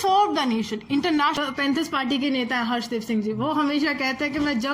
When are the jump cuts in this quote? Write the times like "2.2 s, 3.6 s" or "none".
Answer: 1.4 s